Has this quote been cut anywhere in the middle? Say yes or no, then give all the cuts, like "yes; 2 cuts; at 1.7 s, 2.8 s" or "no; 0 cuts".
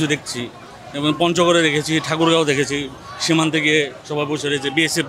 no; 0 cuts